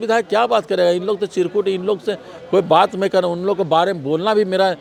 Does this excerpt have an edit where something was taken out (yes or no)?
no